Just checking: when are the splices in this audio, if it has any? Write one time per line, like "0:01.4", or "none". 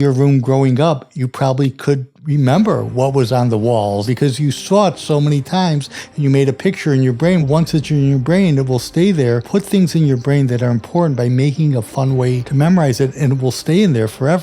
0:04.0
0:07.4
0:09.4
0:12.4